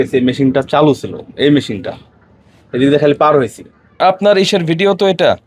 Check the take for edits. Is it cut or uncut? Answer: cut